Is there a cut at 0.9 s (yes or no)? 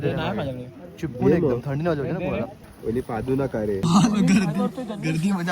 no